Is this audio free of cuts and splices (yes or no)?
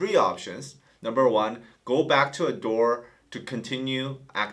yes